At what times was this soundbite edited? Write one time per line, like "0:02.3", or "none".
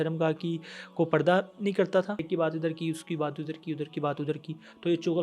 0:02.2